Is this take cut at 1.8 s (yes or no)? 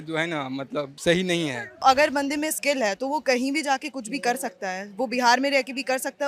yes